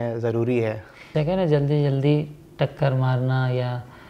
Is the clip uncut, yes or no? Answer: no